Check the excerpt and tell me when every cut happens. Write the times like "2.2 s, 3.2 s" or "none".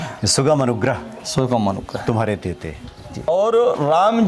3.3 s